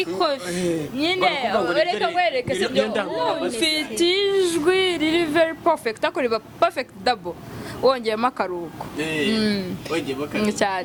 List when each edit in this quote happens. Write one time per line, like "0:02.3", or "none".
none